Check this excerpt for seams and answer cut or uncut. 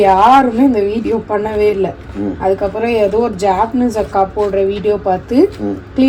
uncut